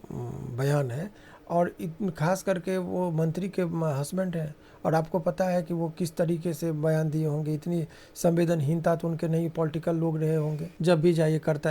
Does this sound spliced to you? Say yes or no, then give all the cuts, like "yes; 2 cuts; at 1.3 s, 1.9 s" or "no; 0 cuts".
yes; 1 cut; at 10.7 s